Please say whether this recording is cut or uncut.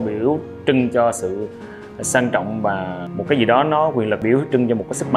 cut